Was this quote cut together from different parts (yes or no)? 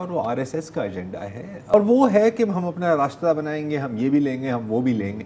yes